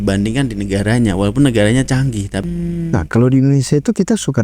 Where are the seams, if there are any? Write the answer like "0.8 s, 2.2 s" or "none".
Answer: 2.4 s